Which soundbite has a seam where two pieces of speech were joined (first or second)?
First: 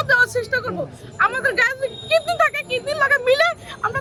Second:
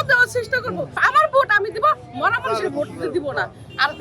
second